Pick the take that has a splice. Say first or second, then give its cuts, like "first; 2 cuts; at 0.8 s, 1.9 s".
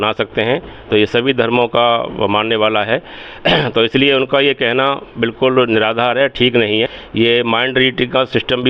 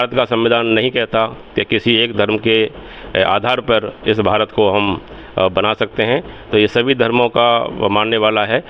first; 1 cut; at 7.0 s